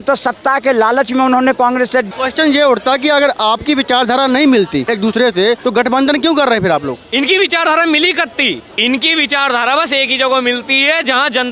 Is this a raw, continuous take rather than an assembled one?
no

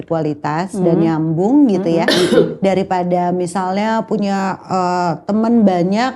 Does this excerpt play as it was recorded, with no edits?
yes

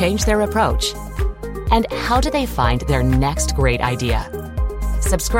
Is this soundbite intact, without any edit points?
yes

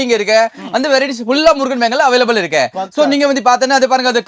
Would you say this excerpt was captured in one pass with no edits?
yes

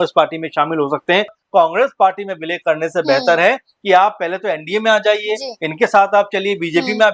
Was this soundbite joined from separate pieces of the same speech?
yes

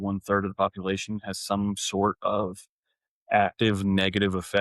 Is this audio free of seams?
yes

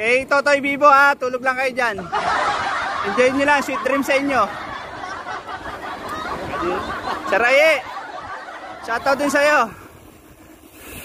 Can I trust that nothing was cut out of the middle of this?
yes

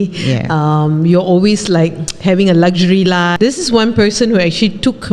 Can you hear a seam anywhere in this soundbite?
yes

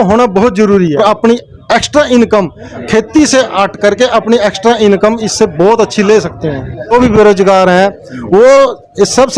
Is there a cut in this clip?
yes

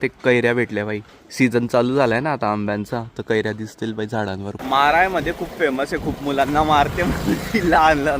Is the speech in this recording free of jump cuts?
no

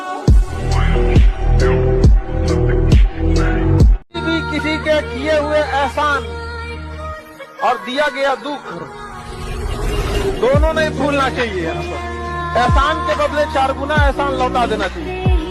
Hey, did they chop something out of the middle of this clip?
no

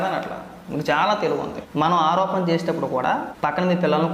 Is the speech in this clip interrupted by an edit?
yes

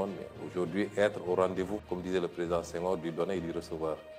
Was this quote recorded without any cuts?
no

